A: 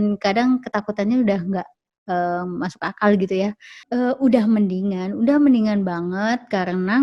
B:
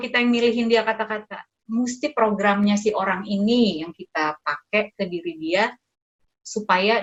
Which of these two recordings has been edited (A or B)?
A